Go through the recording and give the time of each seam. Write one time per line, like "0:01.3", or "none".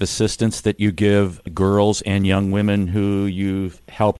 0:01.4

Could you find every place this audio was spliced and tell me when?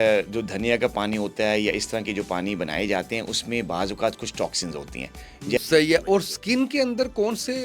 0:05.6

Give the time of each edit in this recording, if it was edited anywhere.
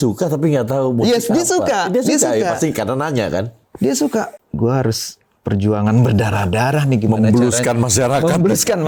0:04.3

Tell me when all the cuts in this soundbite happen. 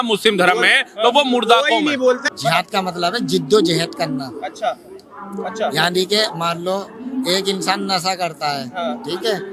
0:02.3

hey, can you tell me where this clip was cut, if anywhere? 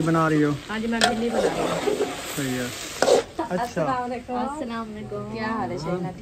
0:03.2

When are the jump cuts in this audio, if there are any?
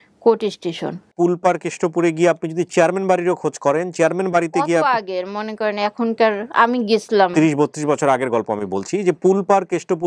0:01.1

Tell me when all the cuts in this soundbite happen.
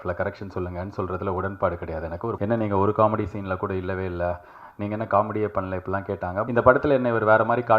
0:02.4
0:06.4

